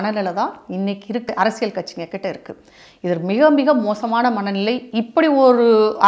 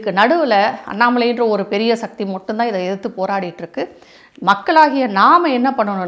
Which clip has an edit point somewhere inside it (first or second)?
first